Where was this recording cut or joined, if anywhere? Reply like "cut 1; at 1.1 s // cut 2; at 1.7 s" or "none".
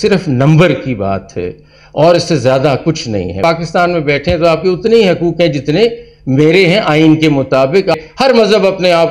cut 1; at 3.4 s // cut 2; at 8.0 s